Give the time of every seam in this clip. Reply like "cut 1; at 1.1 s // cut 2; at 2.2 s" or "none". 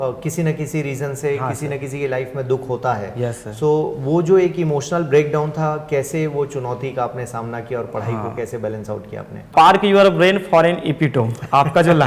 cut 1; at 9.5 s